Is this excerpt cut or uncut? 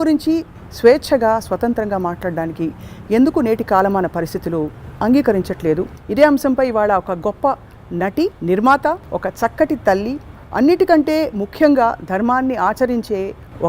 cut